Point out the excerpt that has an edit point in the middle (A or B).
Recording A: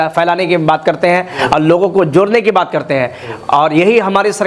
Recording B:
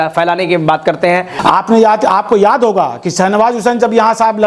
B